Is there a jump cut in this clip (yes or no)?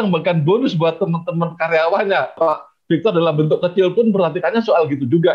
yes